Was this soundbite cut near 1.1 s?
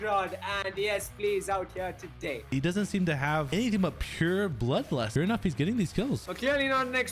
no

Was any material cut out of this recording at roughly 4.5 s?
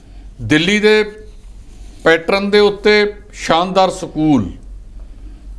no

